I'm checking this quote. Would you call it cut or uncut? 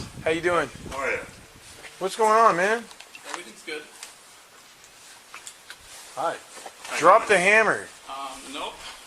uncut